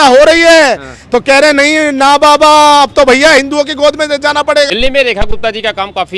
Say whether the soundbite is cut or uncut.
cut